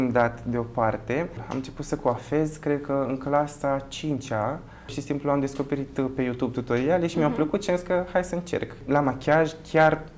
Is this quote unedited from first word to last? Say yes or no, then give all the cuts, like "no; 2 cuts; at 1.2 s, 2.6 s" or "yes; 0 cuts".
no; 3 cuts; at 1.5 s, 5.0 s, 8.8 s